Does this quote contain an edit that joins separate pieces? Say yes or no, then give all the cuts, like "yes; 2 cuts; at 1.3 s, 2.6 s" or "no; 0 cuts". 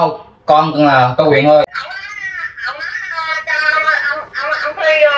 yes; 1 cut; at 1.6 s